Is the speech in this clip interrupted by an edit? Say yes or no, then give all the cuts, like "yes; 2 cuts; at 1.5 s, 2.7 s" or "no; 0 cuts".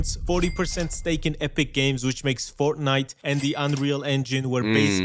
no; 0 cuts